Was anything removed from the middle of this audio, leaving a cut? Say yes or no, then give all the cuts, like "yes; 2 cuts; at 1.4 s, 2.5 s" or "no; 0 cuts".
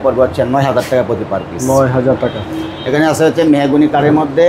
no; 0 cuts